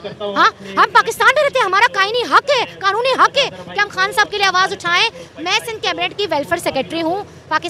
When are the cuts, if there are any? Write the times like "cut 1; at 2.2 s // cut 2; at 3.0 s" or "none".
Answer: none